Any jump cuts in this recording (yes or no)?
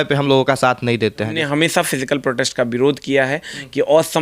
yes